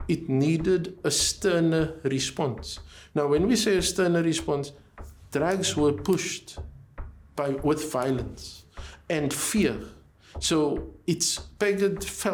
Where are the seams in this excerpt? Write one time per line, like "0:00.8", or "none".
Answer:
none